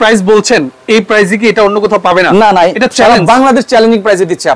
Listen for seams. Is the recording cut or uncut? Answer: uncut